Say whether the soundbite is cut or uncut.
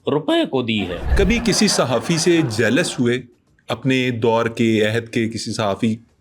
cut